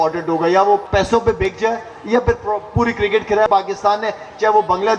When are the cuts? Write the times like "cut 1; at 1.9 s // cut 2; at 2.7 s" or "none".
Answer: cut 1; at 0.8 s // cut 2; at 3.5 s